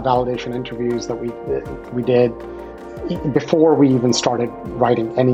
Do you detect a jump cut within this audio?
no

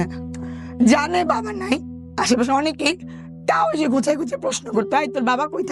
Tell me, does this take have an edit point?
no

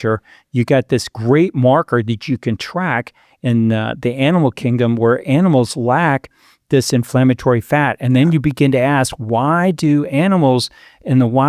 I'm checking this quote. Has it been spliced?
no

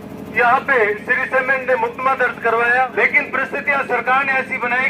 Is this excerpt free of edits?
no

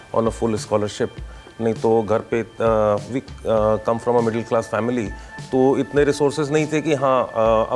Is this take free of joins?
yes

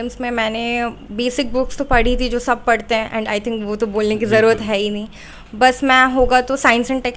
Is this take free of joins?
yes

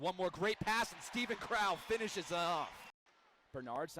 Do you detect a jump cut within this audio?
yes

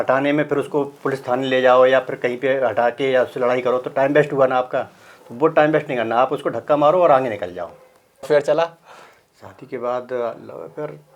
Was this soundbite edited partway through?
yes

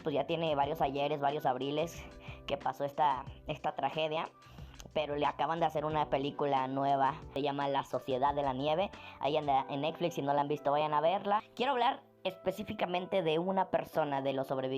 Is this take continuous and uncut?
no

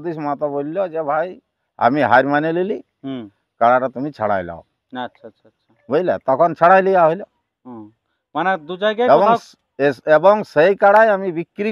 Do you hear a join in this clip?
no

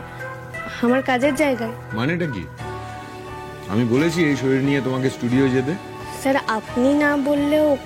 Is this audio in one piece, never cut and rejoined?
yes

